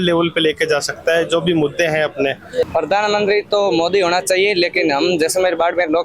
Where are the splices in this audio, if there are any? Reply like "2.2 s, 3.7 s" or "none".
2.7 s